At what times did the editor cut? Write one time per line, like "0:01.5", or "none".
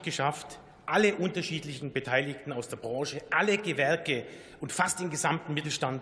none